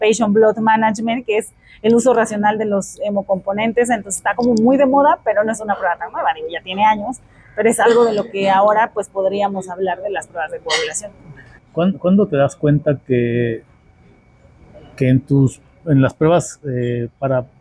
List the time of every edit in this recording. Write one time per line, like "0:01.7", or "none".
none